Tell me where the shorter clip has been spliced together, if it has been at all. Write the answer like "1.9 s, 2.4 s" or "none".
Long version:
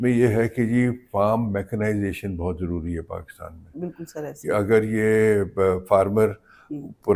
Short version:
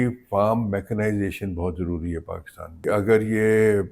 2.8 s